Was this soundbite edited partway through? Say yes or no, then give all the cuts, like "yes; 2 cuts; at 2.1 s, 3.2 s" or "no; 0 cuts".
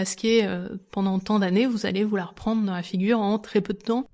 no; 0 cuts